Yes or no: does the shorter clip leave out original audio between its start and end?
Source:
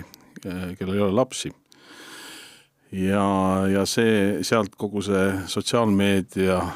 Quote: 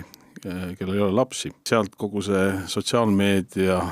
yes